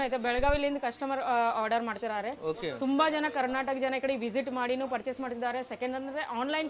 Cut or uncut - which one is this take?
uncut